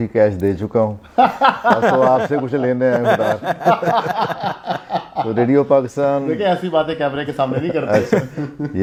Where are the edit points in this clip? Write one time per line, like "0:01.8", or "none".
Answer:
none